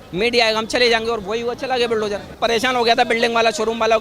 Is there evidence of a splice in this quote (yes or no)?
yes